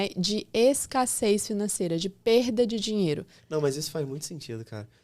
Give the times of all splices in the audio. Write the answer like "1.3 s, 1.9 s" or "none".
3.3 s